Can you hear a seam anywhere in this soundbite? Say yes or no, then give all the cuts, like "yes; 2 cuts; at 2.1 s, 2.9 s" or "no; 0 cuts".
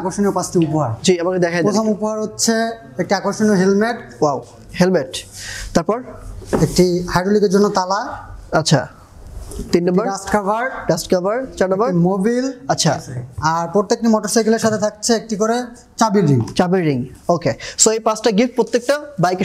no; 0 cuts